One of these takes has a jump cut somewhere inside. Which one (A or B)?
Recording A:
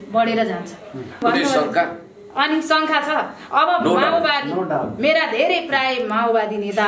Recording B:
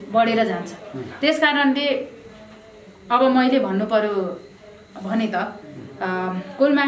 A